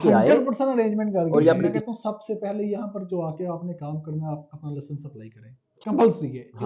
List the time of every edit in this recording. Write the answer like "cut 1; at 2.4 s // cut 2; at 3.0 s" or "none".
cut 1; at 1.8 s // cut 2; at 5.7 s